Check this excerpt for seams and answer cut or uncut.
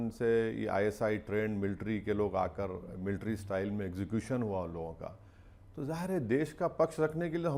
uncut